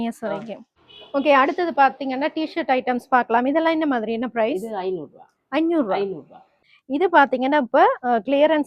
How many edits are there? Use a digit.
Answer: 2